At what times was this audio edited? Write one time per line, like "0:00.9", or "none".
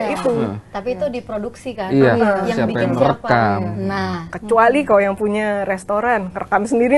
none